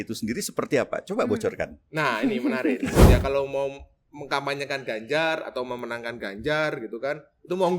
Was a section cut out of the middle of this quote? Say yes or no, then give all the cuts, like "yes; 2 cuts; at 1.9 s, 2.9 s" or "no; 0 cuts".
yes; 1 cut; at 2.9 s